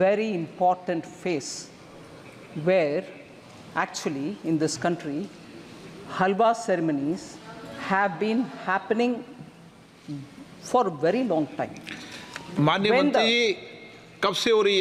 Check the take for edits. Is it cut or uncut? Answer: uncut